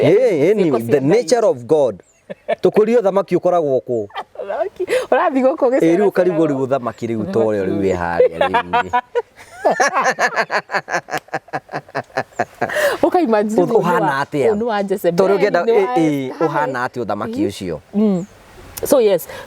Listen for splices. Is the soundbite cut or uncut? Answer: uncut